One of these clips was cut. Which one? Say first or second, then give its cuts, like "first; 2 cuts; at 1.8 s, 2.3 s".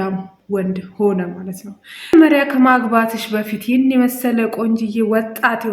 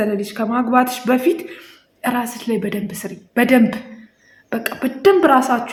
first; 1 cut; at 2.1 s